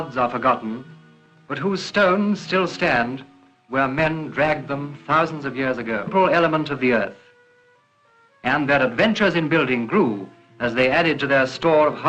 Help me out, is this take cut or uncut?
uncut